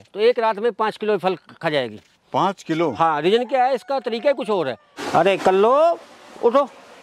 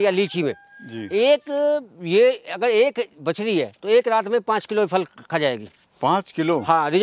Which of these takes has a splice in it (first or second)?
first